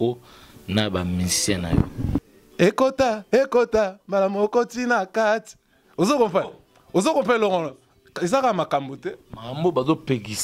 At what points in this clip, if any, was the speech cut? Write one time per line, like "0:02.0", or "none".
0:02.4